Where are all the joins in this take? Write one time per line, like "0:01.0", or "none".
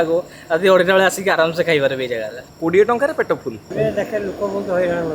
0:03.6